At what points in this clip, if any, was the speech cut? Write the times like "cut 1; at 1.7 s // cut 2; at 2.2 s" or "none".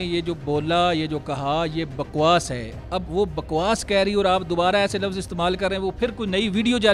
none